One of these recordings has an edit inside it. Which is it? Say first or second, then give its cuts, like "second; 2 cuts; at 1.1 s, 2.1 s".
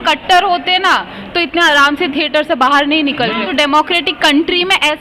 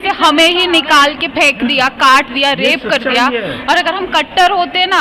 first; 1 cut; at 3.4 s